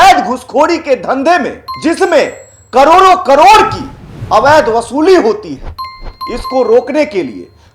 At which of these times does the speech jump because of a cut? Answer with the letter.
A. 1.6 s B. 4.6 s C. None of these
A